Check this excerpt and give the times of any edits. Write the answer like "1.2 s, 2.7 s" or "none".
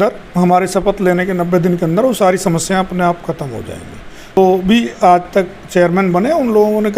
4.4 s